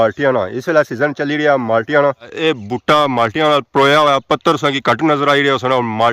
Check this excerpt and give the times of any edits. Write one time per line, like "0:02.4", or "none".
0:02.3